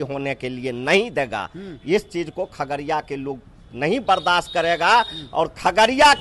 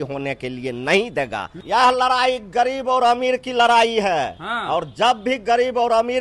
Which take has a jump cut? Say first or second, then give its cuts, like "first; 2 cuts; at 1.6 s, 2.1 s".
second; 1 cut; at 1.5 s